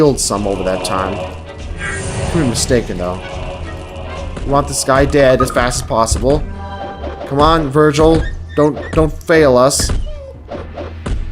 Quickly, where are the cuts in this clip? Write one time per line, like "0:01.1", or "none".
0:05.1